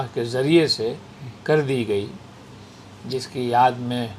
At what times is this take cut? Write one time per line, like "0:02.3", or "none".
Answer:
none